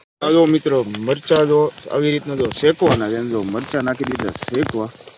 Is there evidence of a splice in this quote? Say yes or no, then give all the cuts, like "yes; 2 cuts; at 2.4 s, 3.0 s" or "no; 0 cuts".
no; 0 cuts